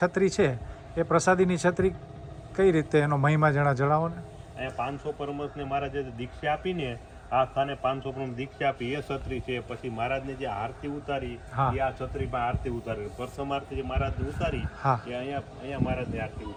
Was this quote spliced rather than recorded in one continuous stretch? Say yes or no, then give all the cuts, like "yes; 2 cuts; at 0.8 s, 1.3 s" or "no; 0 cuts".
no; 0 cuts